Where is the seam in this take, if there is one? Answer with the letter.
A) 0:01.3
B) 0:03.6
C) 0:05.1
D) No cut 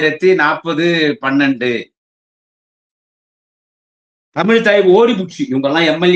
D